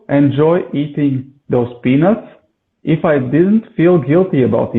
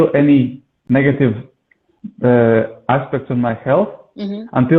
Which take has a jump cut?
first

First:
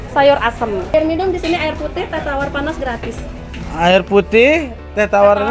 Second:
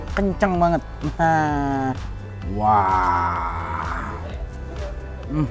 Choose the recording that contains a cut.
first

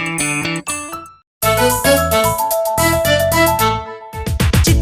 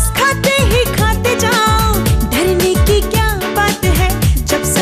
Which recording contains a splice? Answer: first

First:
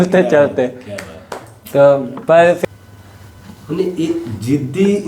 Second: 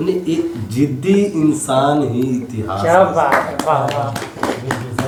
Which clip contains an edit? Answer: first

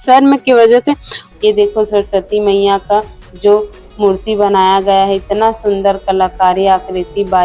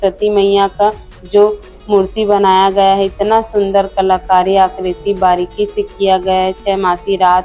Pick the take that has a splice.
first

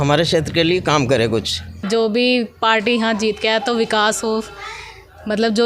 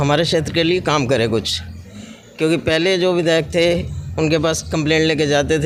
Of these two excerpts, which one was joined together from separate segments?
first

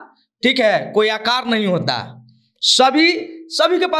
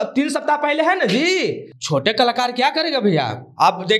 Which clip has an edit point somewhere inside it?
second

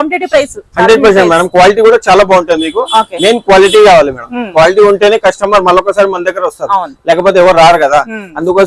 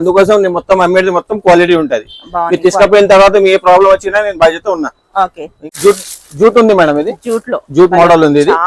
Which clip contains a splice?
second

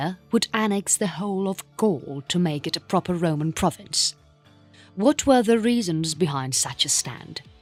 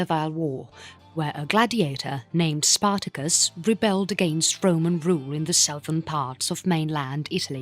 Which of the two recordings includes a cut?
second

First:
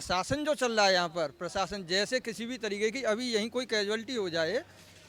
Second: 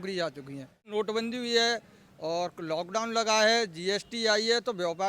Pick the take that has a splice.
second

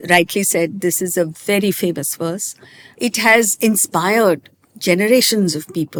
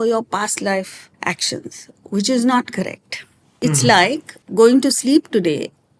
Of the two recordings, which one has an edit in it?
second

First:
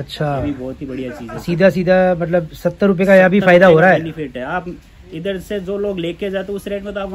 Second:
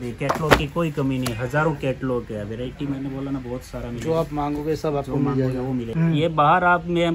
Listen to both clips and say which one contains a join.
second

